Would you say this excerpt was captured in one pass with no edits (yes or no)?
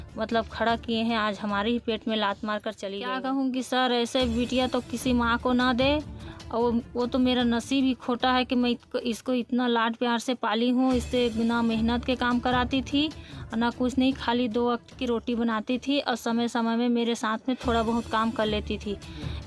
no